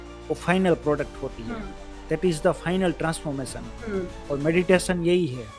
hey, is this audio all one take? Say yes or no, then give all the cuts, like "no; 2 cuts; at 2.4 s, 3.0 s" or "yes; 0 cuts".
yes; 0 cuts